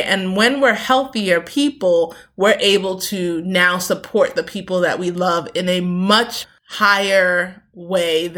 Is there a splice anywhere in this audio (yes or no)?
yes